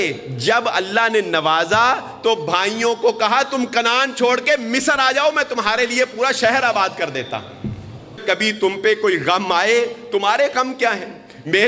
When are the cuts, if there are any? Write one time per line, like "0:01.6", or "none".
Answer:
0:08.2